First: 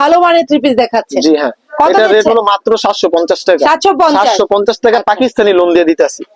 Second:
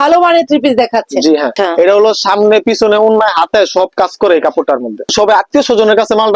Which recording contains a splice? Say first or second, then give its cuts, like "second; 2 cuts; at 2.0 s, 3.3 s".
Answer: second; 2 cuts; at 1.6 s, 5.1 s